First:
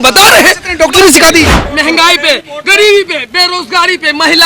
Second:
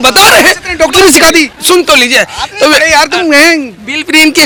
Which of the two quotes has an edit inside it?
first; 1 cut; at 1.6 s

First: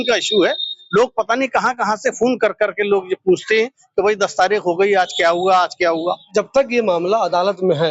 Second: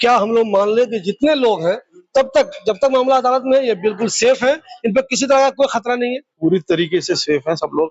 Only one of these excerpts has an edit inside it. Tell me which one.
first; 1 cut; at 6.0 s

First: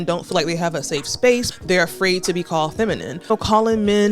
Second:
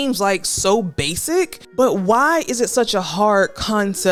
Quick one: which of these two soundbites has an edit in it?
first; 2 cuts; at 1.5 s, 3.3 s

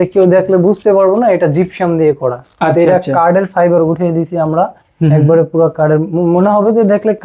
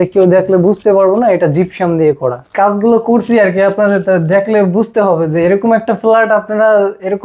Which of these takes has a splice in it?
second; 1 cut; at 2.5 s

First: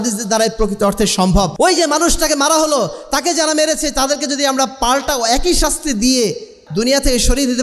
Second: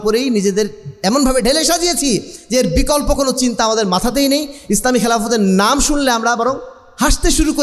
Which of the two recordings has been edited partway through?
first; 2 cuts; at 1.5 s, 6.6 s

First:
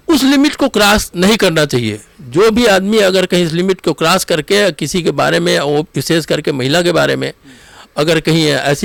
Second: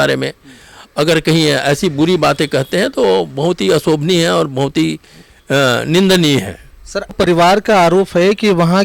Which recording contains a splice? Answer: second; 1 cut; at 7.1 s

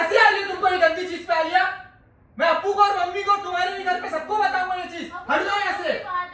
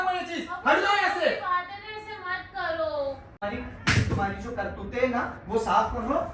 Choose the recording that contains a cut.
second; 1 cut; at 3.4 s

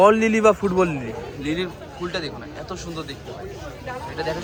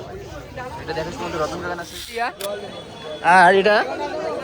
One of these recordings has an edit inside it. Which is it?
second; 1 cut; at 2.4 s

